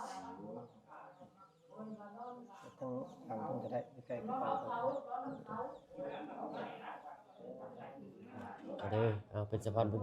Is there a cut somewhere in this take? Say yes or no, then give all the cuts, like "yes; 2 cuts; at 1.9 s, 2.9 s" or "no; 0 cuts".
yes; 2 cuts; at 2.6 s, 8.0 s